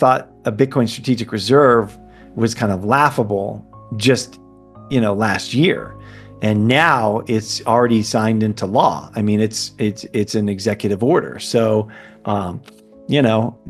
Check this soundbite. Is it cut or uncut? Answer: uncut